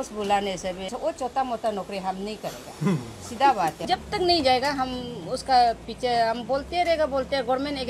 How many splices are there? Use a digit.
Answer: 2